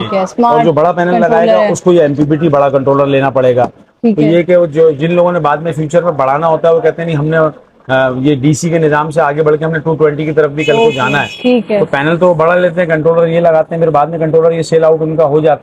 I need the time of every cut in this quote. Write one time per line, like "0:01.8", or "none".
none